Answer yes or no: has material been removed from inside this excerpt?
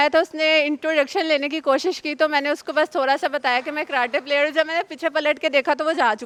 no